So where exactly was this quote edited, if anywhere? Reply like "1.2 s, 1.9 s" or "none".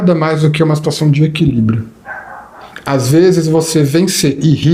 none